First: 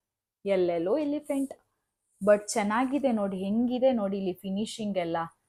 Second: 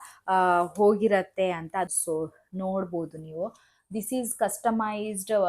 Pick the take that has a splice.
second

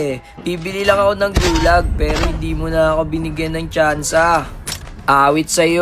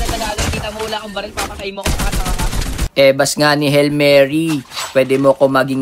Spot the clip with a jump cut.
second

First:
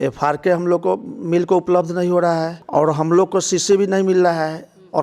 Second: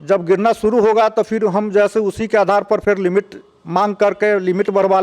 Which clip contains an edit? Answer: first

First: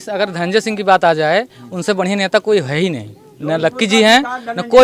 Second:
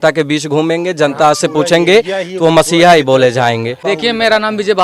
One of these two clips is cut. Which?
second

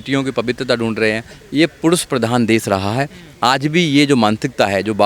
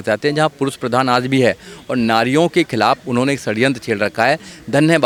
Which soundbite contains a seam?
first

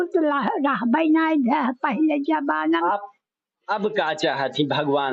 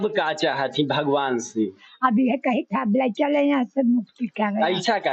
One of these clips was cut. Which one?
first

